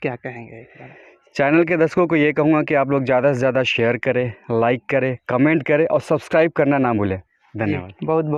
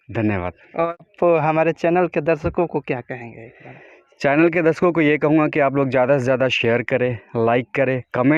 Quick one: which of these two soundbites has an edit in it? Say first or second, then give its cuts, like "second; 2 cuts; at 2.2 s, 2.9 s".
second; 1 cut; at 1.0 s